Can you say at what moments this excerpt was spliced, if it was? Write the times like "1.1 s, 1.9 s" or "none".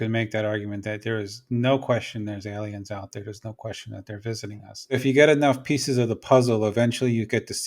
5.0 s